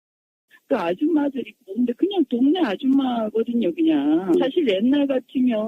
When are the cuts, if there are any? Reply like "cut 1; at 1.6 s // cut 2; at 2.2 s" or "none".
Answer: cut 1; at 4.5 s